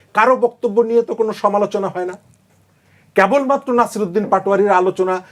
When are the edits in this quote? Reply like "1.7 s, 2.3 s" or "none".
none